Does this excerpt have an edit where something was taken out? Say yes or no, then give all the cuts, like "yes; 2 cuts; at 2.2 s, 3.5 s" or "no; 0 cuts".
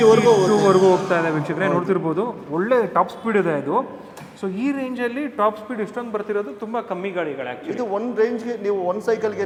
no; 0 cuts